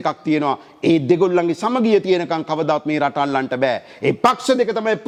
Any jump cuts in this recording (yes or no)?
no